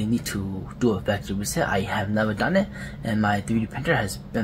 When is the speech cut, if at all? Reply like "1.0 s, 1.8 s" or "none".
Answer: none